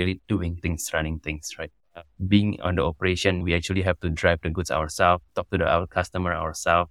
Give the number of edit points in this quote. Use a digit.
2